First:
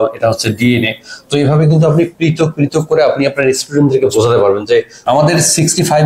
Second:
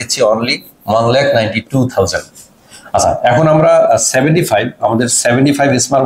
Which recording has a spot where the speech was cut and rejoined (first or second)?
first